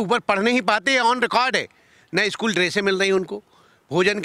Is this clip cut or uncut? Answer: uncut